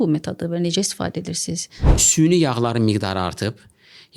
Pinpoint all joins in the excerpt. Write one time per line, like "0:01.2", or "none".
0:01.9